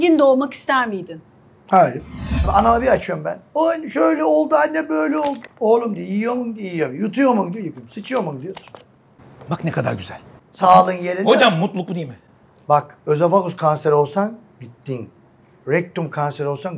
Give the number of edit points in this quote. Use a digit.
1